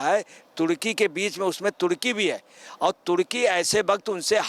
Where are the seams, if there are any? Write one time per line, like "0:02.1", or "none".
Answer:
none